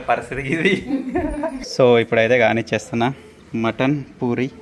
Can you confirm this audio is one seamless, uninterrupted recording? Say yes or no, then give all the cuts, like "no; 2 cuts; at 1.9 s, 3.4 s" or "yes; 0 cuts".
no; 1 cut; at 1.6 s